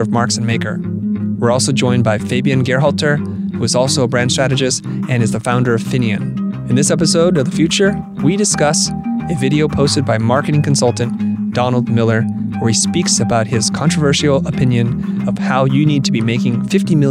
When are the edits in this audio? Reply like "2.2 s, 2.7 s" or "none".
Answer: none

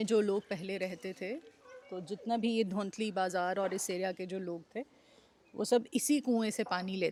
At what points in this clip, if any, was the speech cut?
none

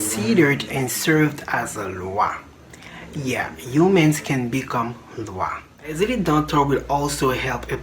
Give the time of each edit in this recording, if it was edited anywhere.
5.9 s

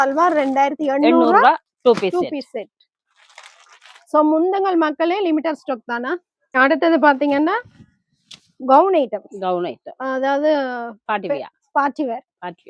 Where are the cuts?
none

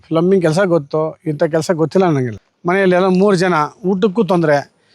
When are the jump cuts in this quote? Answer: 2.3 s

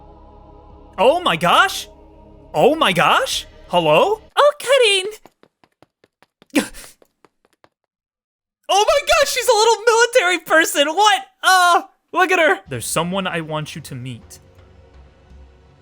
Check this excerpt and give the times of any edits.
4.3 s, 12.7 s

